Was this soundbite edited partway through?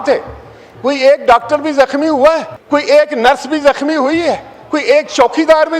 yes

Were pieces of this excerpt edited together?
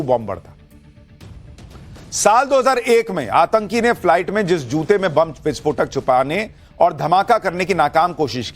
yes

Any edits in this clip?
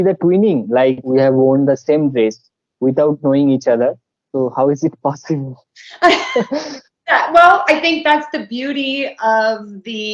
yes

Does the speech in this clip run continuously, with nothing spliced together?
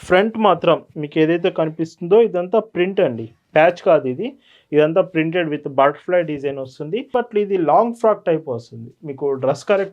no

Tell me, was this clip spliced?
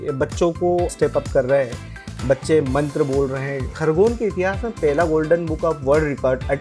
yes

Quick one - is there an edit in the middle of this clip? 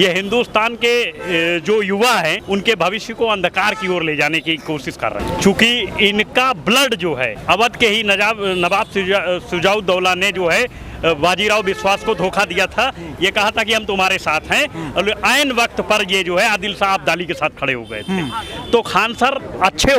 no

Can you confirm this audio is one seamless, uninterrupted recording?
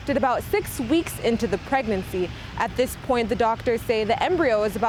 yes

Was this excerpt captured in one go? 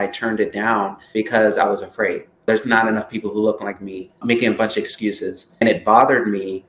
no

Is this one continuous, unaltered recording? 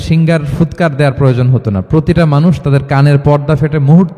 yes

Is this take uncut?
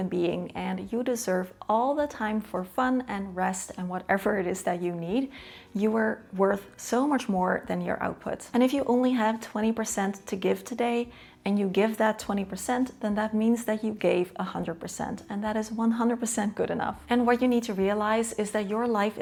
yes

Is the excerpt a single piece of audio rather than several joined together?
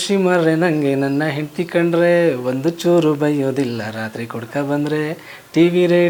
yes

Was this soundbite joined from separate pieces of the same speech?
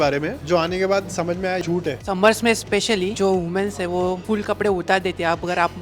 yes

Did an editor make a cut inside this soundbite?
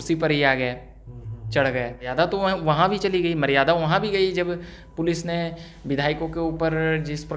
yes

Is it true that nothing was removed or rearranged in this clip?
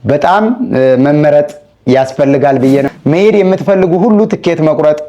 no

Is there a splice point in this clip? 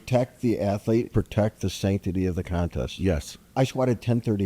yes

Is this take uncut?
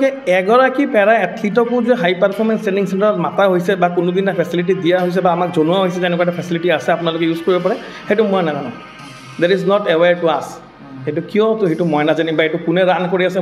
yes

